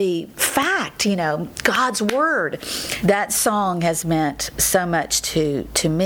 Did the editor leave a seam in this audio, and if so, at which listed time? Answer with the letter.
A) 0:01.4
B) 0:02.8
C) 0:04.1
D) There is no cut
B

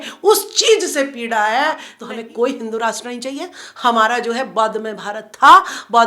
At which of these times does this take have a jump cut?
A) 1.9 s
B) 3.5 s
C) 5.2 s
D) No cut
A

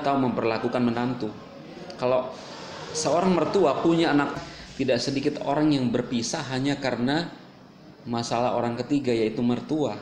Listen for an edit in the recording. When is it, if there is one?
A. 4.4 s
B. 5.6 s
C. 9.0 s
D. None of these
A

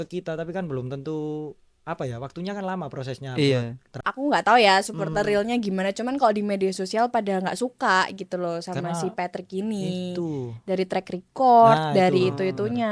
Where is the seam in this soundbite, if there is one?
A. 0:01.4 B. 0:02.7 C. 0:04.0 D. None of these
C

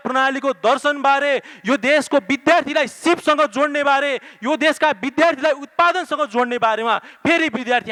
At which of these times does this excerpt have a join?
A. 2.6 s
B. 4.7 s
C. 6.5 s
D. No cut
D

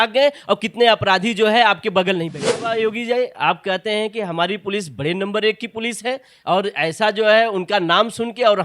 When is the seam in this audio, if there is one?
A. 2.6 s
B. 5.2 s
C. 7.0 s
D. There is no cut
A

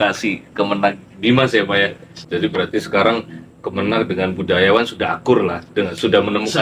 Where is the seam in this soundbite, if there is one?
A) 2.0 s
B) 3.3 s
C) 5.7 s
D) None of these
A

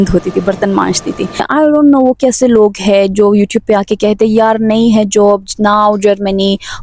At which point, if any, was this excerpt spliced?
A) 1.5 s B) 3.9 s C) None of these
A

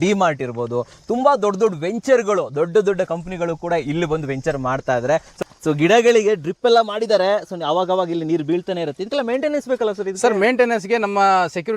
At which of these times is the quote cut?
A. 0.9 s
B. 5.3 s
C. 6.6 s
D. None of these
B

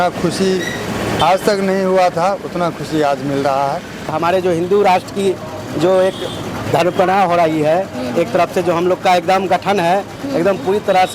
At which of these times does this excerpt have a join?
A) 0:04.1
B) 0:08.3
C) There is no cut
A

